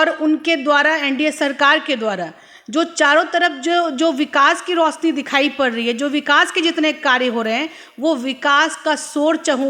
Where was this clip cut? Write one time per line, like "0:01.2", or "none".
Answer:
none